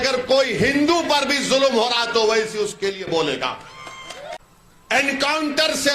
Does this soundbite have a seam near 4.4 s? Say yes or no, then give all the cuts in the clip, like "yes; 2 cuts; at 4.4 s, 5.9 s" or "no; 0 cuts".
yes; 1 cut; at 4.4 s